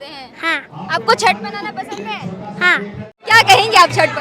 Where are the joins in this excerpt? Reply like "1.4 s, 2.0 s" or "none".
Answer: 3.1 s